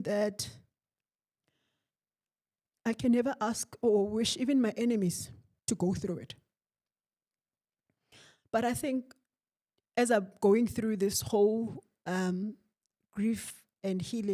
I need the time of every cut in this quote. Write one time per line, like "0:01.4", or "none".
none